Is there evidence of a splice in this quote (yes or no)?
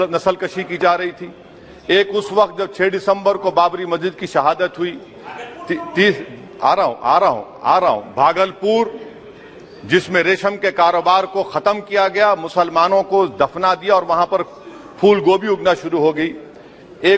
no